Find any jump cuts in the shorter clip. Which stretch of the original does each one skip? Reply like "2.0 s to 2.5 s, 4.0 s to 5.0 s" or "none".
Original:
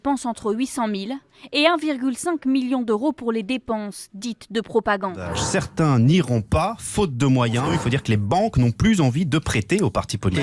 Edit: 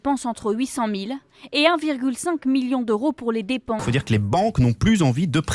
3.8 s to 7.8 s